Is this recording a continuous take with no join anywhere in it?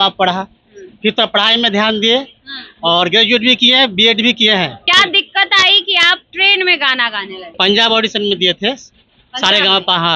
no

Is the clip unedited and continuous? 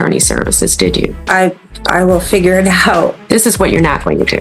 no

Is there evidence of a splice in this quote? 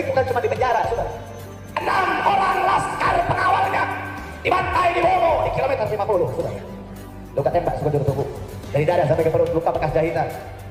no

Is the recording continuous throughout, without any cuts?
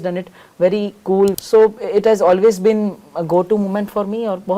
no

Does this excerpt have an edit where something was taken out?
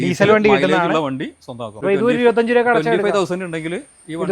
yes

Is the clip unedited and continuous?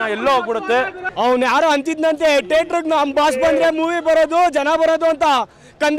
no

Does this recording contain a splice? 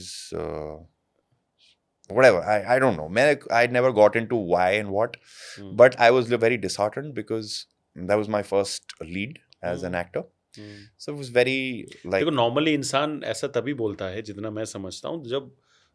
no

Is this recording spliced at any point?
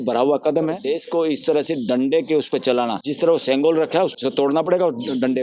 yes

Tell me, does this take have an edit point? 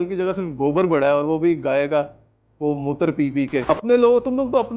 yes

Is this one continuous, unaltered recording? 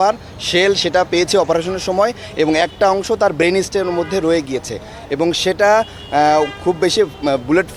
yes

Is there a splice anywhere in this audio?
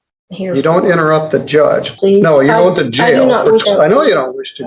yes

